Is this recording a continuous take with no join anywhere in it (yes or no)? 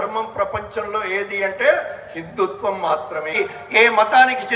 no